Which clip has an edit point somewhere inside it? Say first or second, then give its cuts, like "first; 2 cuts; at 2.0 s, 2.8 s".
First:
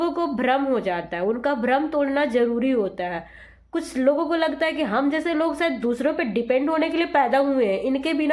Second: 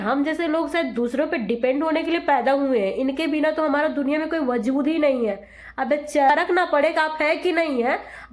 second; 1 cut; at 6.3 s